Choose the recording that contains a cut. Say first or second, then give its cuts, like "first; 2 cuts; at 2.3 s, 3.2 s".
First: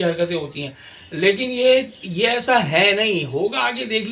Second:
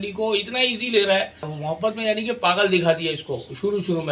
second; 1 cut; at 1.6 s